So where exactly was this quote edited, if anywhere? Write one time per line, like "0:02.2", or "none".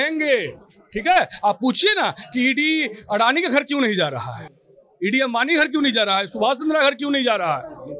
none